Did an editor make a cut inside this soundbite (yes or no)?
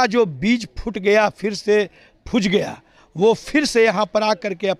no